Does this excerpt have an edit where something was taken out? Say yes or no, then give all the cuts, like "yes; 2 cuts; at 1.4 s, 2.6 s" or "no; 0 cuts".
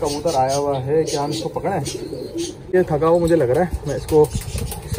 yes; 1 cut; at 2.7 s